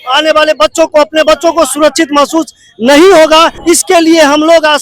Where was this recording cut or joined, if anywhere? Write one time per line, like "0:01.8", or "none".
0:03.5